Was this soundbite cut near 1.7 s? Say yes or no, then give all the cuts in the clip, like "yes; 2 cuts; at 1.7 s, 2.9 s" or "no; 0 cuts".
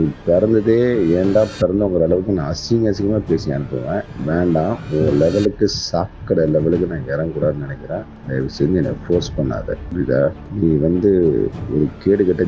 no; 4 cuts; at 4.1 s, 8.1 s, 9.8 s, 10.4 s